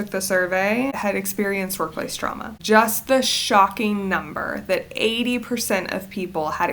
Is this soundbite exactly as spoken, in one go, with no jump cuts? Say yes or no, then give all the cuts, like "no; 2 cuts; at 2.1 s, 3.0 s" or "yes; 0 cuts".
no; 2 cuts; at 1.0 s, 2.5 s